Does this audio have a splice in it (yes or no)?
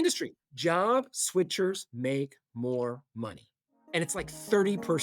no